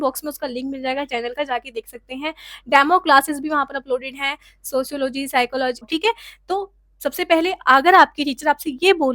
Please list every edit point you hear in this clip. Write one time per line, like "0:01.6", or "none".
0:05.9